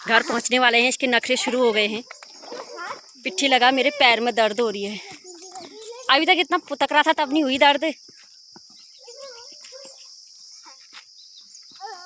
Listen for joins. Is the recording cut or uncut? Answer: uncut